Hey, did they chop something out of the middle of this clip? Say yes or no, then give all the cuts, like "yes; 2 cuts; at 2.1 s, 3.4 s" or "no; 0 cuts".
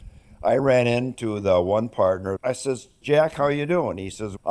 yes; 1 cut; at 2.3 s